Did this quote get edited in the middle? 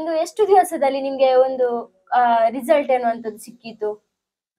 no; 0 cuts

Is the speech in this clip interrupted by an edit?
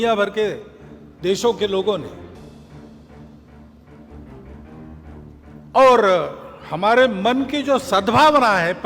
yes; 3 cuts; at 2.1 s, 4.6 s, 5.6 s

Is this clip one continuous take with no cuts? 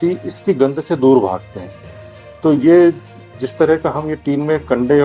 yes; 0 cuts

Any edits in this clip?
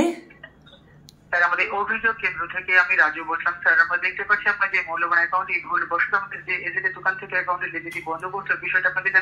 no; 0 cuts

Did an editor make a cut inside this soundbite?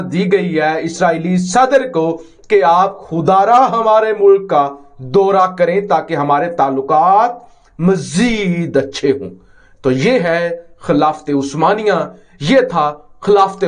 no; 0 cuts

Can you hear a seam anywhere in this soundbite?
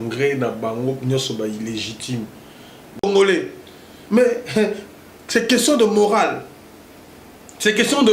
yes; 1 cut; at 3.0 s

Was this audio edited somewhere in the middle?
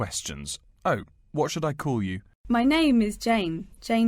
yes; 2 cuts; at 2.3 s, 3.0 s

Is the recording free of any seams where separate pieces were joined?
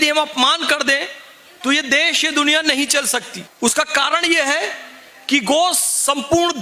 no; 1 cut; at 3.4 s

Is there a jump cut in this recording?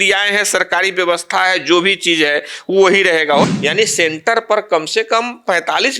yes; 1 cut; at 3.4 s

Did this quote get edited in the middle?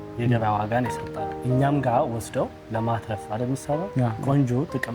yes; 3 cuts; at 1.3 s, 2.6 s, 4.2 s

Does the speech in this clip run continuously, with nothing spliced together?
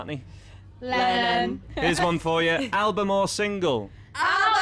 no; 1 cut; at 1.7 s

